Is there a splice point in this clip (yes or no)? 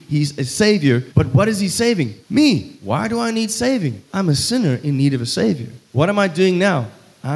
yes